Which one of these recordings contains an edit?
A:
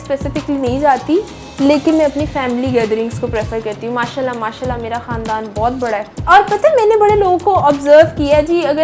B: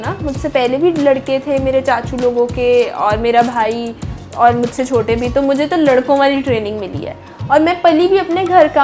A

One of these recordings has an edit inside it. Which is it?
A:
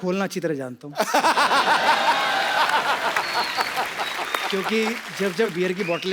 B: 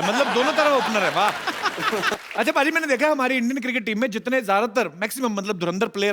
B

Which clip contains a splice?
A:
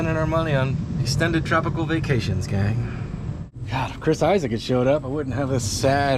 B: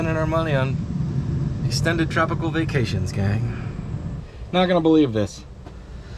A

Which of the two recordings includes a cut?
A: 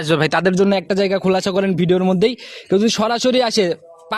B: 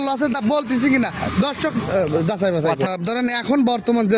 B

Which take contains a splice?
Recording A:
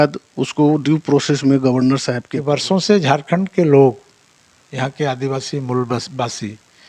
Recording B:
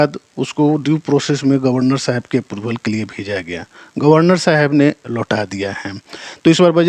A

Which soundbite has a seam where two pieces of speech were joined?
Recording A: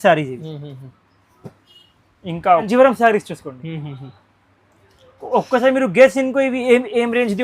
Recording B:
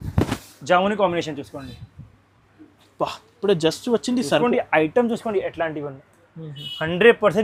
A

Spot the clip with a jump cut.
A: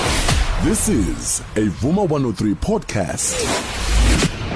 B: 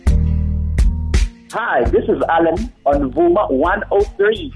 B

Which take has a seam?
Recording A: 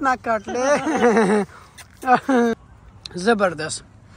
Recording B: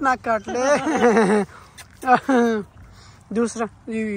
A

